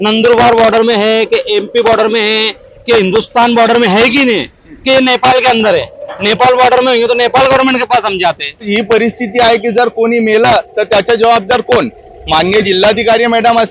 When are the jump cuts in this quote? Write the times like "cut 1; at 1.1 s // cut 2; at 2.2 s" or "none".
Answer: cut 1; at 8.7 s